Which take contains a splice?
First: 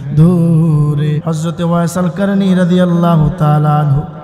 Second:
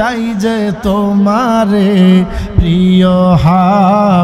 first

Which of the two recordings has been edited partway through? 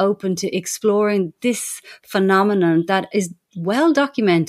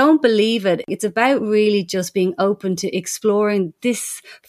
second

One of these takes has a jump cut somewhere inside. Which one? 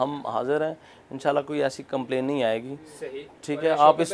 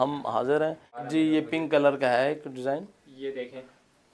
second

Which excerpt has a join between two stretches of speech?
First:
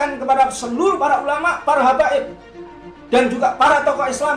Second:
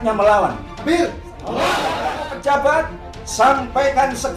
second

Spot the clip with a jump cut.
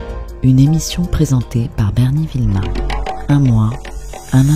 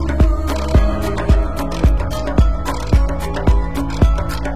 first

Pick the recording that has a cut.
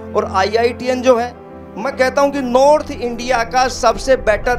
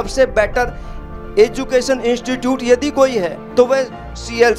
second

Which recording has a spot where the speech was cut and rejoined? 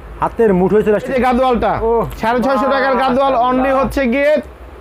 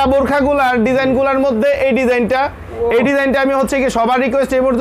first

